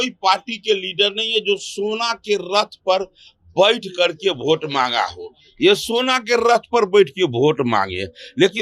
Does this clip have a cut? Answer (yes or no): no